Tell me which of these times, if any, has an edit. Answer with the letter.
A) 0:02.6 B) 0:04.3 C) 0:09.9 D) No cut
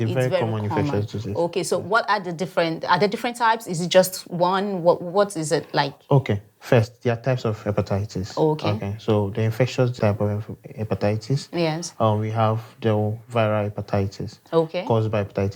C